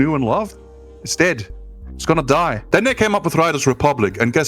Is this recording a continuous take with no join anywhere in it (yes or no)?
no